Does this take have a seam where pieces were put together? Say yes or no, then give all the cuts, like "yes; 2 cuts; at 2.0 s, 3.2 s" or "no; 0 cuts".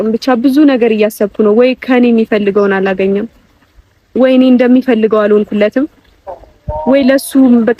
no; 0 cuts